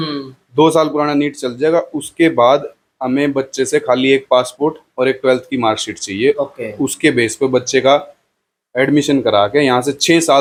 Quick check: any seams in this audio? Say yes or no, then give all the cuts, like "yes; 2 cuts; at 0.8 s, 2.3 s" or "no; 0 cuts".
no; 0 cuts